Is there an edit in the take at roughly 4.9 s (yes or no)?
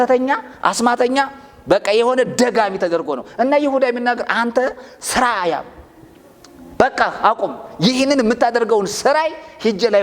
no